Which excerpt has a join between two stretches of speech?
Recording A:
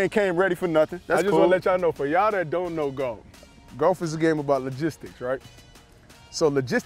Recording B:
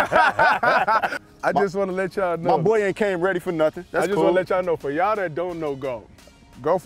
B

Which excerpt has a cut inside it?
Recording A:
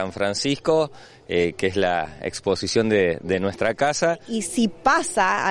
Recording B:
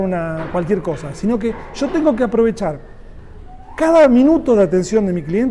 A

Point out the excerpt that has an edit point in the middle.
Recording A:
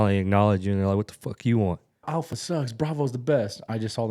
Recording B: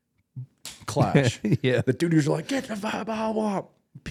A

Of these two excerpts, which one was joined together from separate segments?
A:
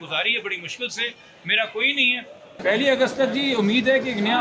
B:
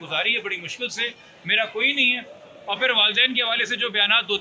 A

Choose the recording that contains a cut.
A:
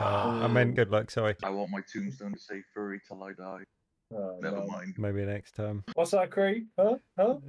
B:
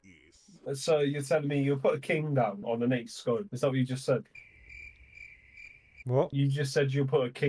A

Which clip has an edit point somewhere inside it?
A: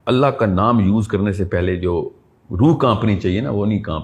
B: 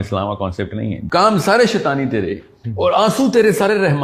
B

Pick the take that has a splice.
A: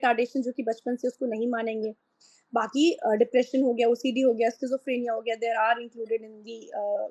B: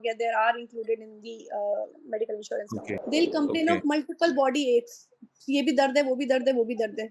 B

